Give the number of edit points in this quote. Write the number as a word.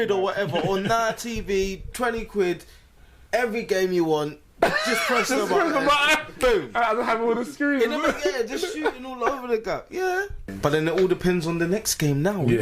one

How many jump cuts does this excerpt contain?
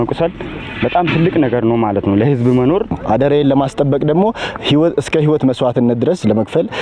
one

